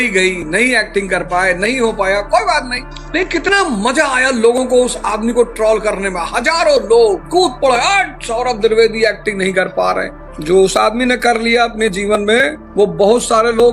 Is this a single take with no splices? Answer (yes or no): yes